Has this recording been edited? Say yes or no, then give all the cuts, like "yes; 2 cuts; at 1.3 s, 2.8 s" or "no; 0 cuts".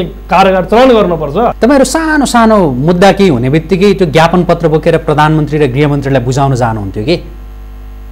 yes; 1 cut; at 1.5 s